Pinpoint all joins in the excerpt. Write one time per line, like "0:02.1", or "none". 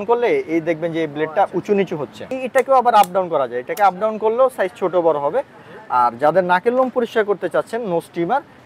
0:02.3